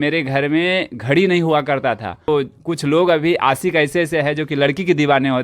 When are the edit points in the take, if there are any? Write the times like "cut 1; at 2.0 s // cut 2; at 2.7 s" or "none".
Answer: cut 1; at 2.3 s

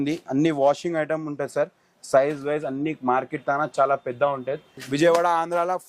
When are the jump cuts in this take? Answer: cut 1; at 4.7 s

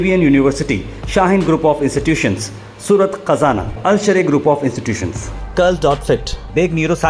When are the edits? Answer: none

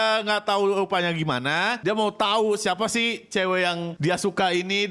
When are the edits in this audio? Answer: cut 1; at 1.8 s // cut 2; at 3.9 s

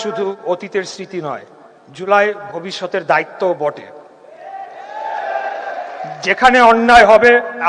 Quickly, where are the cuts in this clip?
none

